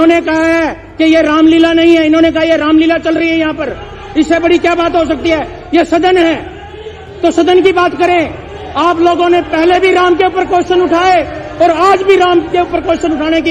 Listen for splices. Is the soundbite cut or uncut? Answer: uncut